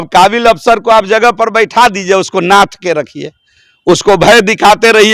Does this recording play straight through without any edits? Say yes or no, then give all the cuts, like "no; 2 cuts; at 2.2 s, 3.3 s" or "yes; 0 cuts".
yes; 0 cuts